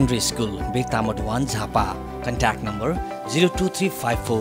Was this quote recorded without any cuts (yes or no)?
yes